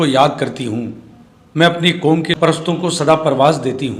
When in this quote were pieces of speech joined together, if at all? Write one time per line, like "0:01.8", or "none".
0:02.3